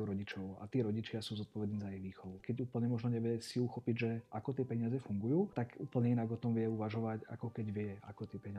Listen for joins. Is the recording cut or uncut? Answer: cut